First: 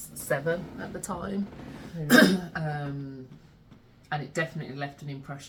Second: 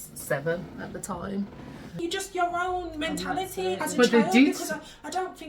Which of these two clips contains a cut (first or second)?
second